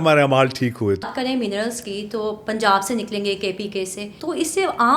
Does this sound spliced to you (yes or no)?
yes